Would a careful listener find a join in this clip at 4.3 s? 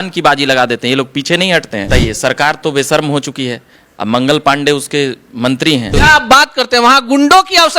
no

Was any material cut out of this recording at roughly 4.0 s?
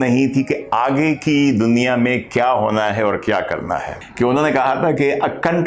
yes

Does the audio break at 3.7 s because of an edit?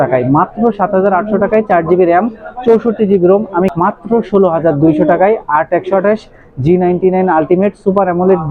yes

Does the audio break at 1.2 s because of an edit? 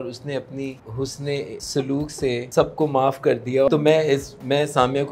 yes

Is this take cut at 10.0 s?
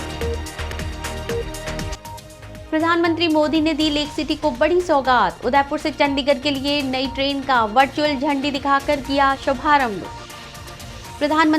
no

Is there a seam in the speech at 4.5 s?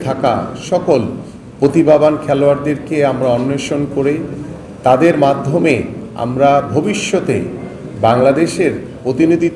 no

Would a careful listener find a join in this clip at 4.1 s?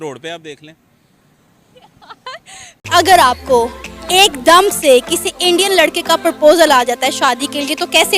no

